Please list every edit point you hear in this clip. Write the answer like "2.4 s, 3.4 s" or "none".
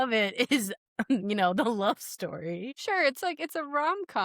2.7 s